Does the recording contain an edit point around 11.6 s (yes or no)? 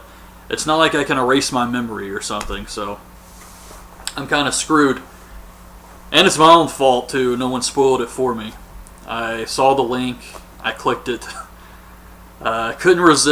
no